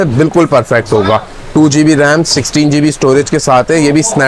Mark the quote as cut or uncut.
uncut